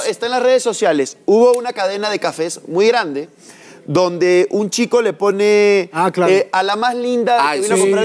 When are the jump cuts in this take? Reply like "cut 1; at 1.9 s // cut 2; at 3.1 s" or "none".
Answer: none